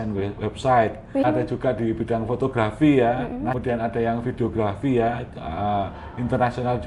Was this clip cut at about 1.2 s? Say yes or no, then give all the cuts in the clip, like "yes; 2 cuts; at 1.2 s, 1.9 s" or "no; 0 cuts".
yes; 2 cuts; at 1.2 s, 3.6 s